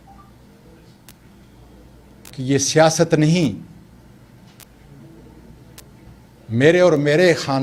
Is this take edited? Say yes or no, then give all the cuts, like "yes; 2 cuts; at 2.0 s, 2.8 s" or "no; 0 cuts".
no; 0 cuts